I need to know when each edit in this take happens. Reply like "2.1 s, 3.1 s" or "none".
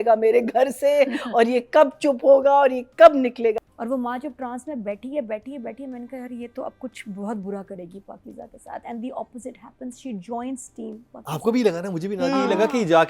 3.6 s

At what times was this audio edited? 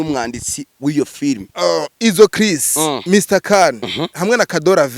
1.5 s

